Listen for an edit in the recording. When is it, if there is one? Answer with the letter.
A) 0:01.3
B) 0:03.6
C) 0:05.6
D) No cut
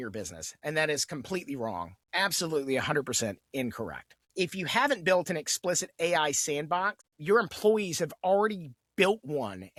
D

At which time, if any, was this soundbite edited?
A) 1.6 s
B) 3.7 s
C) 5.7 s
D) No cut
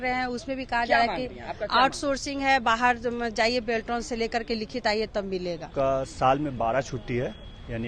C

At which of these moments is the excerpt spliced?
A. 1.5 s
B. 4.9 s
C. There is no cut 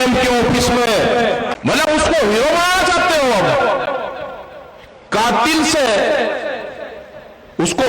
A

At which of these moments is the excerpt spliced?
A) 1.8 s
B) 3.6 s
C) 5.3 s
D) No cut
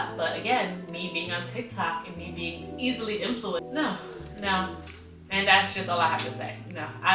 B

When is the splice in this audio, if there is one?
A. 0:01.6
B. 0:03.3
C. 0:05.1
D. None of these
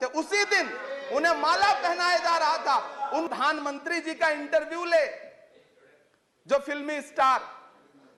B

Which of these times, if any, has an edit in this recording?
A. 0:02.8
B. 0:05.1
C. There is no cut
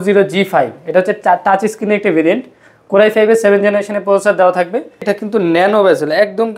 B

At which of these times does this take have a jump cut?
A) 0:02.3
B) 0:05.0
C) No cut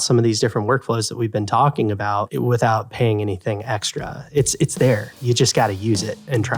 A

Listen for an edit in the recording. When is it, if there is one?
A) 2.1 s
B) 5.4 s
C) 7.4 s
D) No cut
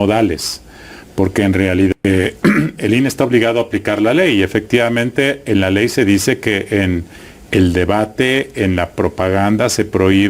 A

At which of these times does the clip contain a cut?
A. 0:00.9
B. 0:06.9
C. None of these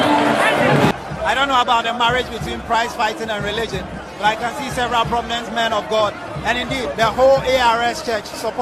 A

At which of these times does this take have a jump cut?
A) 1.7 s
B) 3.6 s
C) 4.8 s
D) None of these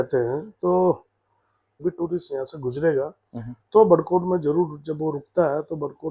A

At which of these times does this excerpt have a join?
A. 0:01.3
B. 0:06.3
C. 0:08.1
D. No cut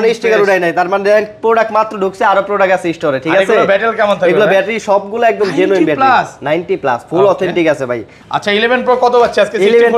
C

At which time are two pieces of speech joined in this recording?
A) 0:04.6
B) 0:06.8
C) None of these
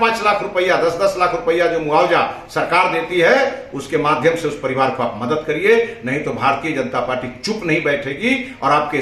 C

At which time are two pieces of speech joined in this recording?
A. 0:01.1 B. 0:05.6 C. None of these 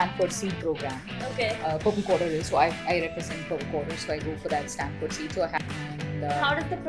B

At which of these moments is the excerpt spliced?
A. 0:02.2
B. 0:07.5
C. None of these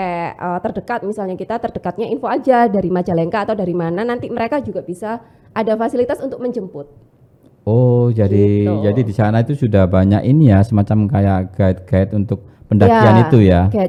C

